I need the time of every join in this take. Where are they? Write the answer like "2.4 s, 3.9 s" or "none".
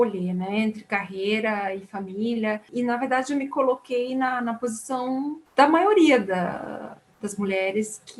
2.7 s, 5.4 s